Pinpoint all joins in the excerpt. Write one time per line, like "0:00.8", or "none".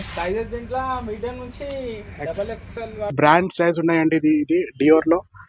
0:03.1